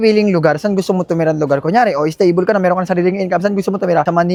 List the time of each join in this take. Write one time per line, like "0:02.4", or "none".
none